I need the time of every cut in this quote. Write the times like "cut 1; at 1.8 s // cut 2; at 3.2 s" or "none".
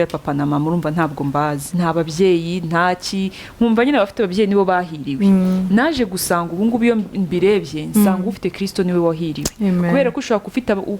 cut 1; at 1.6 s